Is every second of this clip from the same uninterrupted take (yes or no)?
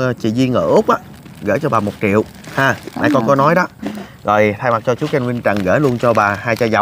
yes